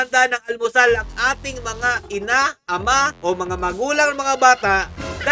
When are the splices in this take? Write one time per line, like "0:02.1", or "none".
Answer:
none